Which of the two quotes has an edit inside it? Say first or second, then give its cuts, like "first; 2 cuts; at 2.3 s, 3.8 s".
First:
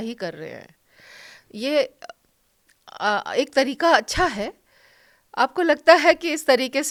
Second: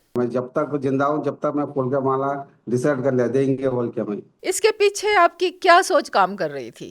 second; 1 cut; at 4.3 s